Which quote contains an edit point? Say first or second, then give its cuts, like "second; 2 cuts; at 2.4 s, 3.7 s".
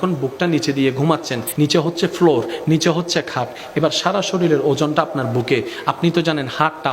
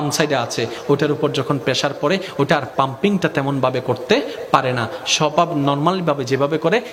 first; 1 cut; at 1.4 s